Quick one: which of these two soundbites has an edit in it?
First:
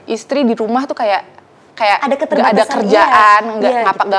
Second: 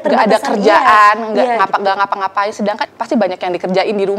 second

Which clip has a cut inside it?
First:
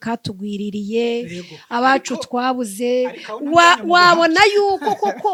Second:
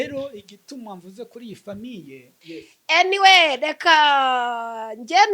second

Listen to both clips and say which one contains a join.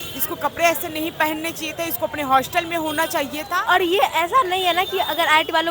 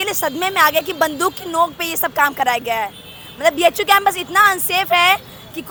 first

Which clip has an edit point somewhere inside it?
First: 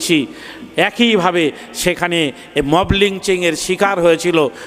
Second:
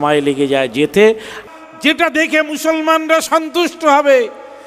second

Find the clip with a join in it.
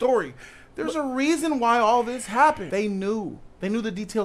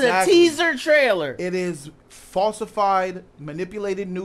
first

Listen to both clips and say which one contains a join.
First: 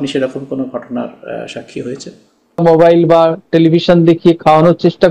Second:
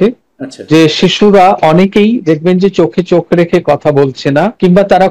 first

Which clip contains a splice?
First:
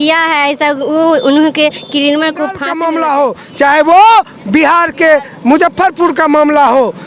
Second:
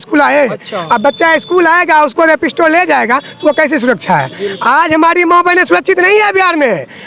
first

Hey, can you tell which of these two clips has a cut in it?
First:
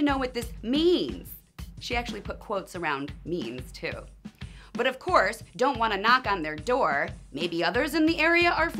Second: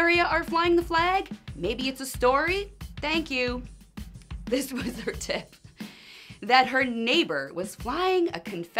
first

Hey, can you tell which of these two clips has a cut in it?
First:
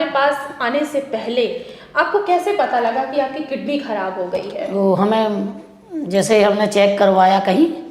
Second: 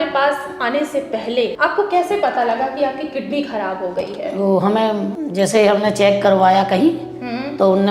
second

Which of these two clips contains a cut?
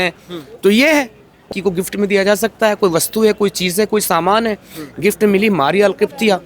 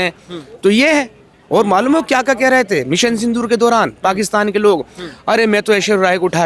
first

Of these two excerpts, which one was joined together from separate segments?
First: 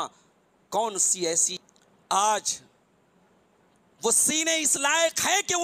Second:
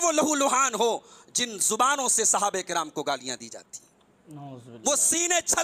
first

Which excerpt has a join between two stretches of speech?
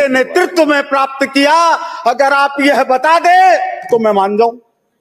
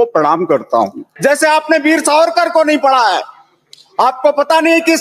second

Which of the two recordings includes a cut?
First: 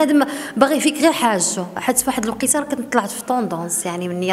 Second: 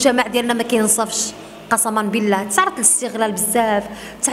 first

